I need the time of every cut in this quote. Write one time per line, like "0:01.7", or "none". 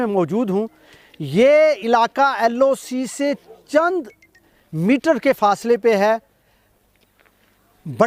none